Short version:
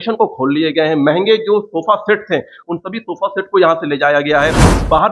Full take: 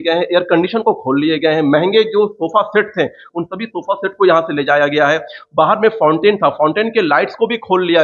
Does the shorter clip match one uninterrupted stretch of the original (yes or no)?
yes